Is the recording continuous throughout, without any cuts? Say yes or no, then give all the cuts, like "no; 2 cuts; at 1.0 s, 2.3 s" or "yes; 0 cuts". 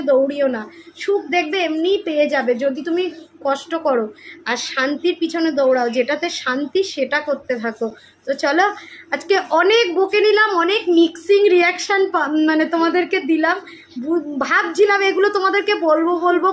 yes; 0 cuts